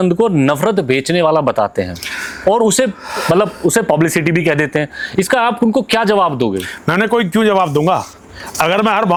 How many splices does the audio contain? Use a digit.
0